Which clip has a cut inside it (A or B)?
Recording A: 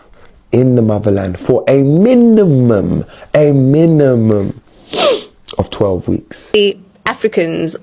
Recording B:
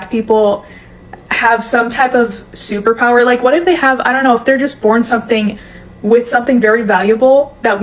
A